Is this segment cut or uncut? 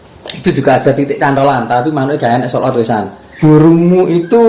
cut